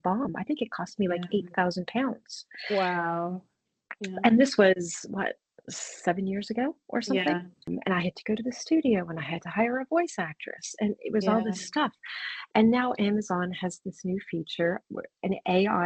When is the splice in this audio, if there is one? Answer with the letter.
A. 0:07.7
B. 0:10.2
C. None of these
A